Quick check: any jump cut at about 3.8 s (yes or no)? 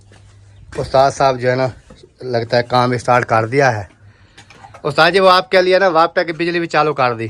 no